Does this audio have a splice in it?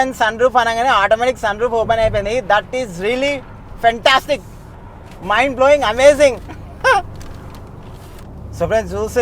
yes; 2 cuts; at 3.5 s, 8.2 s

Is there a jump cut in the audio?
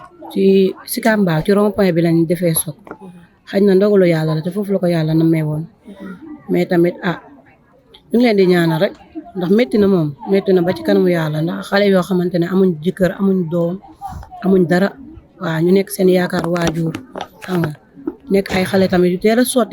no; 0 cuts

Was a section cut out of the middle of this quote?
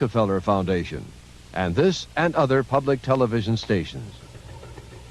no; 0 cuts

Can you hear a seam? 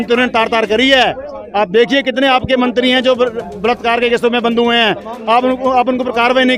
no; 0 cuts

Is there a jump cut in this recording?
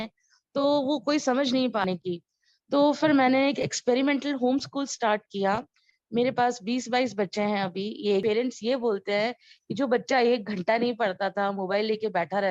yes; 2 cuts; at 1.9 s, 8.2 s

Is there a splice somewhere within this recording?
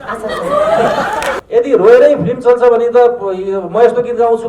yes; 1 cut; at 1.3 s

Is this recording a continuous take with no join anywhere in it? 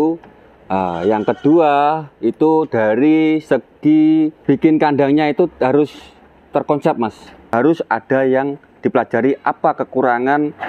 no; 2 cuts; at 4.4 s, 7.5 s

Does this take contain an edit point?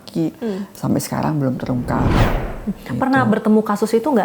yes; 1 cut; at 2.2 s

